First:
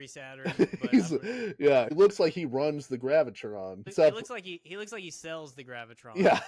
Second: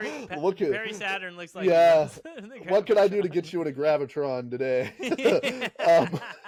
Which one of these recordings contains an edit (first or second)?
first